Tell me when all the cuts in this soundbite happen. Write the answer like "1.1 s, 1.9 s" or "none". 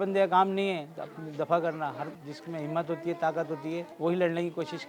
2.2 s, 3.9 s

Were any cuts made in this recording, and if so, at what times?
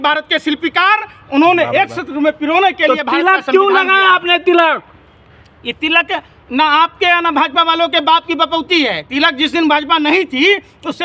none

